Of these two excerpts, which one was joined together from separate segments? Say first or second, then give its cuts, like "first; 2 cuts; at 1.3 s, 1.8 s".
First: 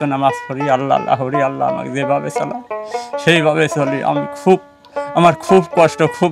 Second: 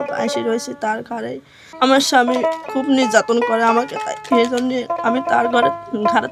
second; 2 cuts; at 1.7 s, 2.6 s